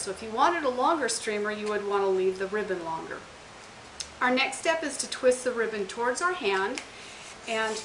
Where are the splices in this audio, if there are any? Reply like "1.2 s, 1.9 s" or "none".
5.9 s

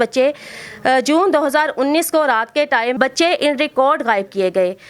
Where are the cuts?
3.0 s

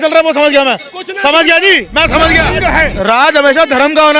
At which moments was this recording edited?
2.6 s

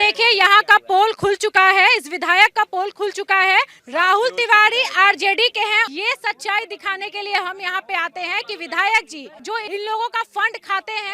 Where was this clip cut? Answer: 5.9 s

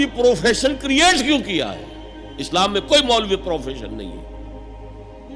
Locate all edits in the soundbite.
none

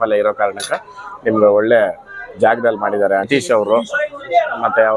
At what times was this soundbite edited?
3.3 s

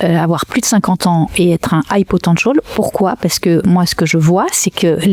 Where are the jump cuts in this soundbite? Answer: none

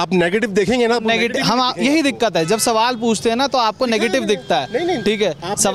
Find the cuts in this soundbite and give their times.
none

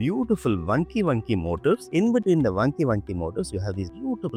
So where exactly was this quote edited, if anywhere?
none

